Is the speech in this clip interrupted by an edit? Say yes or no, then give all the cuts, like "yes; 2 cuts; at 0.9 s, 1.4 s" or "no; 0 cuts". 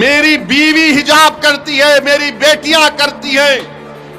no; 0 cuts